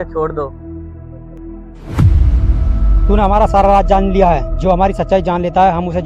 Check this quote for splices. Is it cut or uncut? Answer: uncut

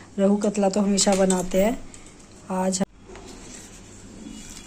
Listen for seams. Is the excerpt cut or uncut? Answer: cut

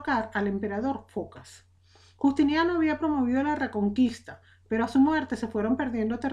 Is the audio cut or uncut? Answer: cut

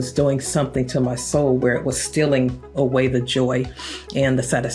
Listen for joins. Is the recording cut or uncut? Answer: uncut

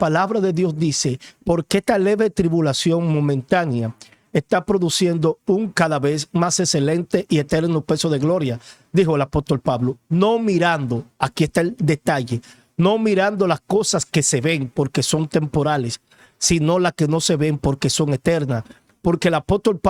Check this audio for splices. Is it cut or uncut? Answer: uncut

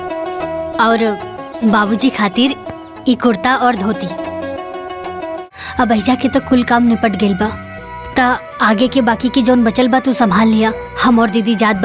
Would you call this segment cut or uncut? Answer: cut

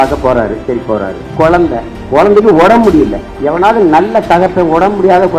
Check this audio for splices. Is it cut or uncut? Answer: cut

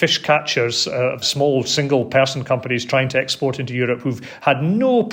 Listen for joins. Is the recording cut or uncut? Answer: uncut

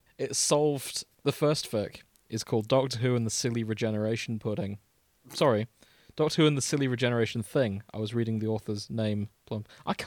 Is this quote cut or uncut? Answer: cut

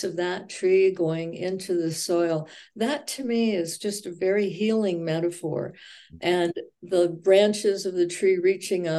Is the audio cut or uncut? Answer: uncut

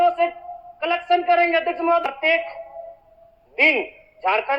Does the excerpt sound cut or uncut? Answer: cut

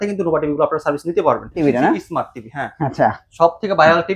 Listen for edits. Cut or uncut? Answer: cut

